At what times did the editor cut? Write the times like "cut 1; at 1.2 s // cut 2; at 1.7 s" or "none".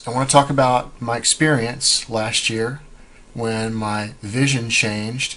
cut 1; at 4.1 s